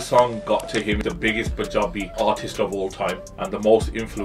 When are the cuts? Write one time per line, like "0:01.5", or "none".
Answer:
0:01.0
0:02.1
0:03.3